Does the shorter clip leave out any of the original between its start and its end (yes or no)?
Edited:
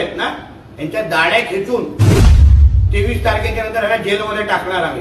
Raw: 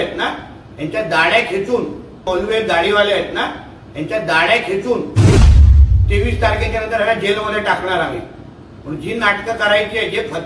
yes